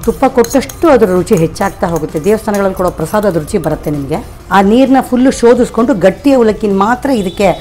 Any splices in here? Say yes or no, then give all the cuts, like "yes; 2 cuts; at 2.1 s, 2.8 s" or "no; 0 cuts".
yes; 1 cut; at 4.4 s